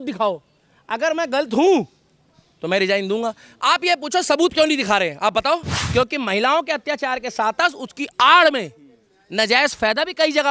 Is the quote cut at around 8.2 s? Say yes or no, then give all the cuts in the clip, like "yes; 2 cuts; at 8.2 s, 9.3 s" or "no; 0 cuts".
no; 1 cut; at 5.8 s